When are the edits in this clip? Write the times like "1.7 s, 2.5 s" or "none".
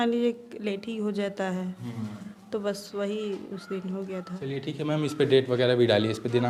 none